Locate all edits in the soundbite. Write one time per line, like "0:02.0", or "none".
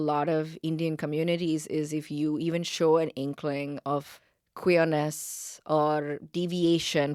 none